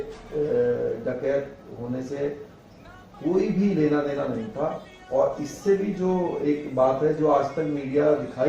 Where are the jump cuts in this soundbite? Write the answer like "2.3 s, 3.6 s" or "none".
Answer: none